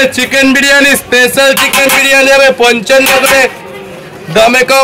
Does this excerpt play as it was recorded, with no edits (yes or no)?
yes